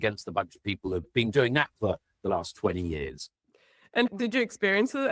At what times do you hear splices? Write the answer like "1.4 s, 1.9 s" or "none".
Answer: 4.1 s